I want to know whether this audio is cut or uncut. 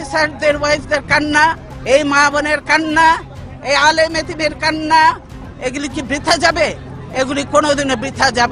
cut